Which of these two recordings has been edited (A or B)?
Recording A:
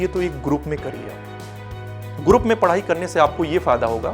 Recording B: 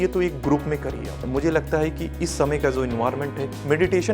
B